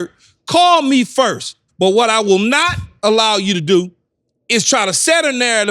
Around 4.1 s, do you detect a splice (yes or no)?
no